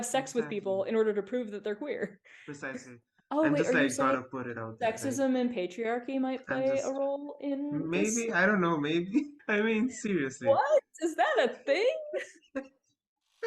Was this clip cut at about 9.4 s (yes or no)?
yes